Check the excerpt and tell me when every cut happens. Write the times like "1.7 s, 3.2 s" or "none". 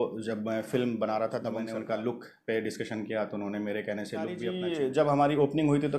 1.6 s, 4.5 s